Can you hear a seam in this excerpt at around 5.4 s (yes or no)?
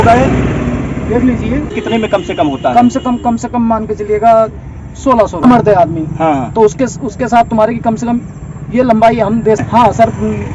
yes